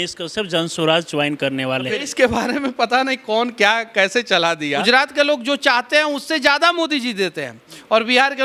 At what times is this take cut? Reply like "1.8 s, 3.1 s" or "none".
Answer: 1.9 s, 4.8 s